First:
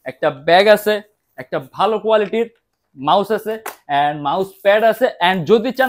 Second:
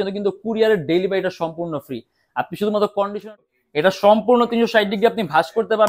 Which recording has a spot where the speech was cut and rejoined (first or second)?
second